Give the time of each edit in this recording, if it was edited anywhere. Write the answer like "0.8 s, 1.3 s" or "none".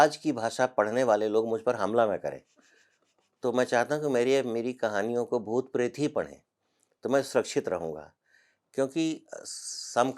none